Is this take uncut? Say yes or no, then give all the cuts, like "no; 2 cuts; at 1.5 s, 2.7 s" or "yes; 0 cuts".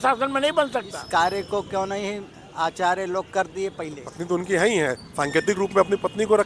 no; 2 cuts; at 1.0 s, 4.1 s